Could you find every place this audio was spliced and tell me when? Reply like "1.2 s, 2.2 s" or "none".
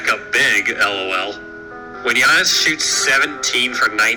1.9 s